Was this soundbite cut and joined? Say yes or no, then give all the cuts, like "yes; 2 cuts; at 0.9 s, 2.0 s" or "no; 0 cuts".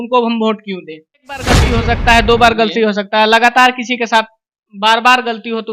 yes; 1 cut; at 1.6 s